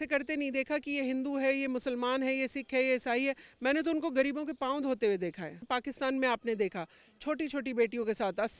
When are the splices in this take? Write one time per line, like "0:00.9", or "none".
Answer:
0:05.7

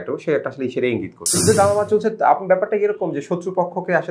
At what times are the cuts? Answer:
0:01.4

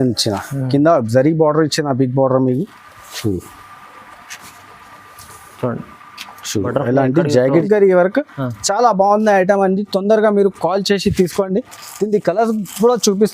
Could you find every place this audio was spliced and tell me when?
0:07.6

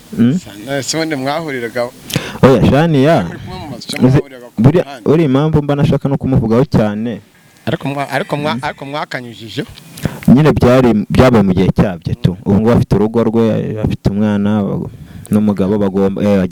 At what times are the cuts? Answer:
none

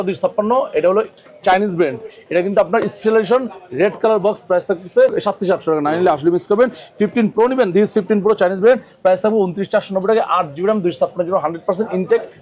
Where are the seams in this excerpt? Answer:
none

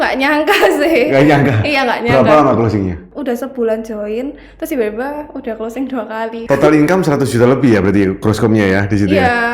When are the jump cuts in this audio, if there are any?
0:03.1
0:06.4

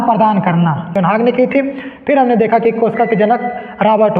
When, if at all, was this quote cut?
0:01.0

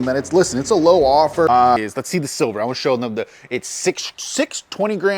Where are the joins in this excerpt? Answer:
0:01.8

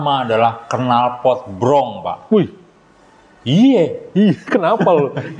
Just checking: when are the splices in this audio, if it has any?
none

